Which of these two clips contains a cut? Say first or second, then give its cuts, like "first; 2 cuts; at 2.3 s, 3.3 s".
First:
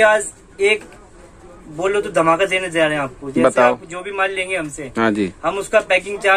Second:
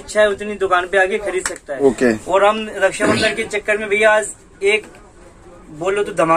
second; 1 cut; at 1.7 s